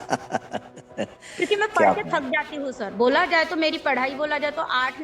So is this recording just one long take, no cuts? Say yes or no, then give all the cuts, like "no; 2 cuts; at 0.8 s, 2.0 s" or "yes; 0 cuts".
yes; 0 cuts